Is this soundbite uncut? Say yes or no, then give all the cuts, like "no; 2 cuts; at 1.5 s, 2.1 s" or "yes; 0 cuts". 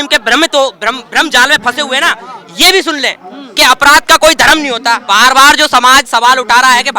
no; 1 cut; at 5.0 s